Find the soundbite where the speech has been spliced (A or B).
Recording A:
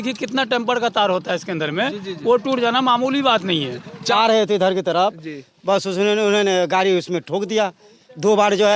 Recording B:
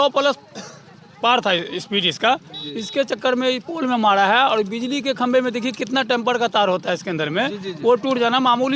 A